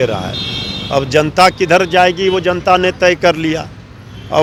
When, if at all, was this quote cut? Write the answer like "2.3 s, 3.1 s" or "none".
none